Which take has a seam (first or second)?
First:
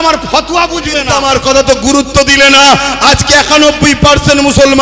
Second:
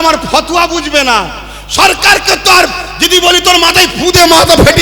first